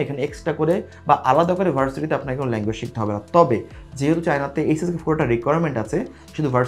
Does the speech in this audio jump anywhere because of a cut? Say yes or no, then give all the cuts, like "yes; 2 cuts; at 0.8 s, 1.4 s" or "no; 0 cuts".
no; 0 cuts